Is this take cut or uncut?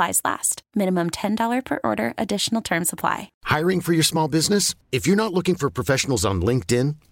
cut